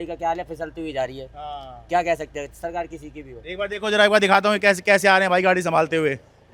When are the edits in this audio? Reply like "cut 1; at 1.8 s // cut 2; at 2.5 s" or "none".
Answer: none